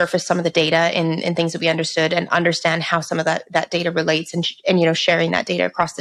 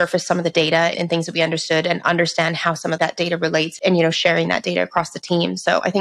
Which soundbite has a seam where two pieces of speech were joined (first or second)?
second